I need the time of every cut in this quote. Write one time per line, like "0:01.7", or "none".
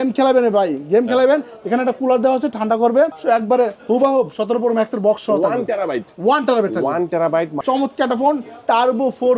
0:03.2
0:07.5